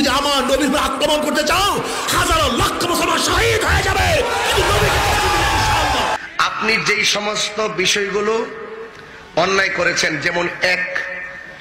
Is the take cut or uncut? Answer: cut